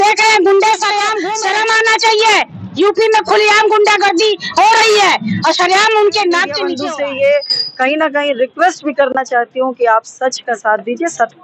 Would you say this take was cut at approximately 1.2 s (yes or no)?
yes